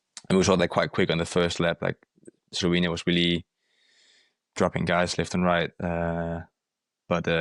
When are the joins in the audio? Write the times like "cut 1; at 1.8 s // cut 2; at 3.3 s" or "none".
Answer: none